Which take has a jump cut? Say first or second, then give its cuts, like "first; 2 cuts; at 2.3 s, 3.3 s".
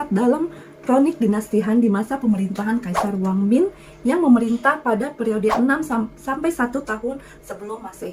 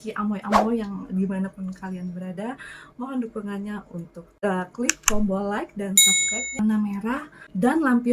second; 1 cut; at 6.6 s